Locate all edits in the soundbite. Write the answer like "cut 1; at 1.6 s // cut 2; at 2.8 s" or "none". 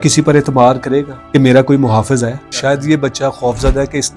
cut 1; at 1.2 s // cut 2; at 2.4 s